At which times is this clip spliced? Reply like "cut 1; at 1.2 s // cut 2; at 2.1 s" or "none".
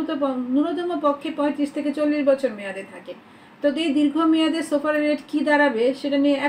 none